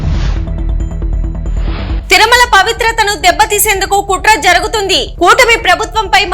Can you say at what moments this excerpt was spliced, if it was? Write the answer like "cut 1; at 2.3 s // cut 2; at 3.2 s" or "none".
cut 1; at 2.0 s